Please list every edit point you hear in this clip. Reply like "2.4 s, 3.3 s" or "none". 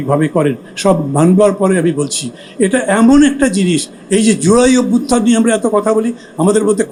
none